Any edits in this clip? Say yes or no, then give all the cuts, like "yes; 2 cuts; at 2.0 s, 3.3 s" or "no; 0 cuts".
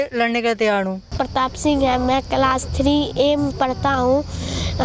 no; 0 cuts